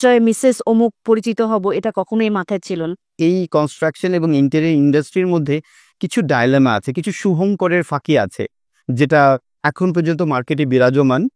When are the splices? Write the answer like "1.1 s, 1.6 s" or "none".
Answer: 3.1 s